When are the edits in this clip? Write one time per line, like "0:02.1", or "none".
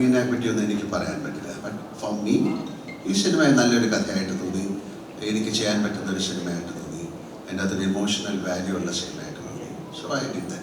none